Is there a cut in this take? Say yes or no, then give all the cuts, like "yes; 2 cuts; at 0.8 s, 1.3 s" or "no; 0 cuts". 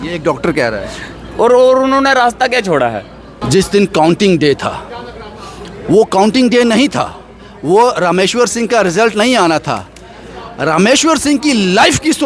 yes; 1 cut; at 3.3 s